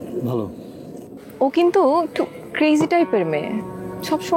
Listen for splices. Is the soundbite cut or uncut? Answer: cut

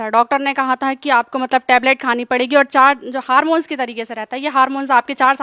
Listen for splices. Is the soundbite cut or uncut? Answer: uncut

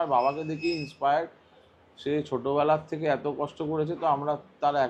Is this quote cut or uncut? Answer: uncut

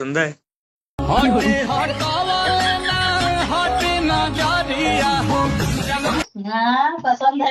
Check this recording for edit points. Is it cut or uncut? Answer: uncut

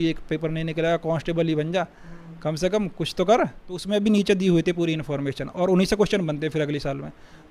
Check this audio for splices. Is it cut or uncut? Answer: cut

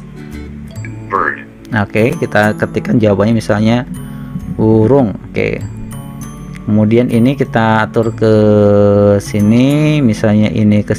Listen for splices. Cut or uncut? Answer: cut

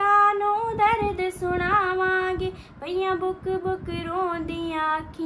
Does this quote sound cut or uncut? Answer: uncut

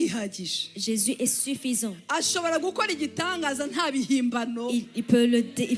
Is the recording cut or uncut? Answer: uncut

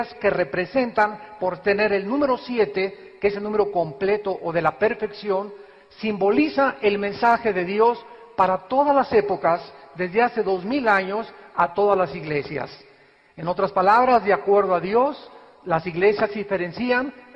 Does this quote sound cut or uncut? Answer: cut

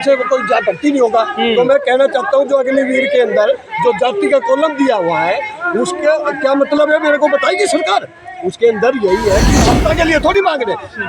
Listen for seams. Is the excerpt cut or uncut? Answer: cut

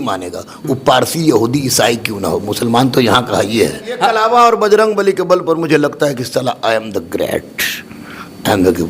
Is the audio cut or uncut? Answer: cut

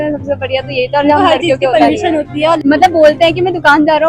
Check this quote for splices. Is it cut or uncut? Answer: cut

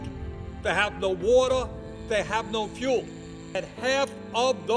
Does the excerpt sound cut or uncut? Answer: cut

